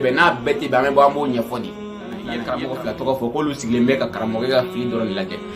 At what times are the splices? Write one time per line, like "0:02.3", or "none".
0:02.3